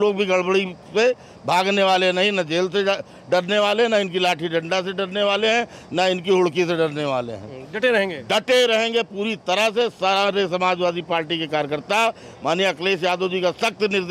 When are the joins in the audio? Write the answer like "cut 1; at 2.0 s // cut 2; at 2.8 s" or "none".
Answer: none